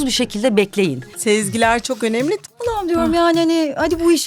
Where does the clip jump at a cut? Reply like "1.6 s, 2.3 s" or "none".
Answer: 1.1 s, 2.4 s